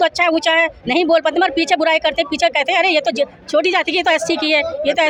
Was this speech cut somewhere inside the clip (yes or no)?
no